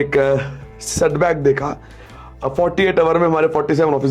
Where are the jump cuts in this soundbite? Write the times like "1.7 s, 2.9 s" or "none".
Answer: none